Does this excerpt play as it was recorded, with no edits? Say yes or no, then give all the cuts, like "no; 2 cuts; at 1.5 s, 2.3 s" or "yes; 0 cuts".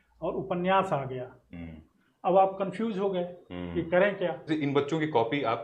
no; 1 cut; at 4.5 s